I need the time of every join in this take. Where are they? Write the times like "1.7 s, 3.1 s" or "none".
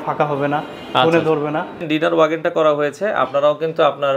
1.8 s